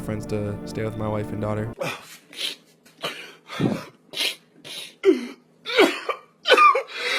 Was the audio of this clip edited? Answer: no; 0 cuts

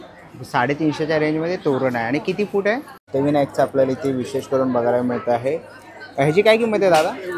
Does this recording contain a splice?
yes; 1 cut; at 3.1 s

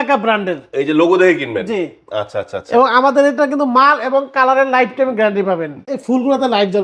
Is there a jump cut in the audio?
yes; 1 cut; at 5.9 s

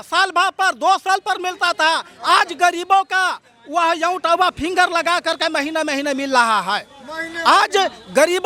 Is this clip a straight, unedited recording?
yes; 0 cuts

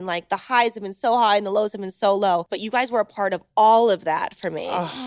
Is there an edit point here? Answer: yes; 1 cut; at 2.6 s

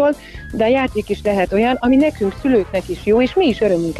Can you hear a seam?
no; 0 cuts

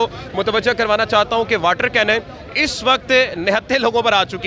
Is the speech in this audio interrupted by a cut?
no; 0 cuts

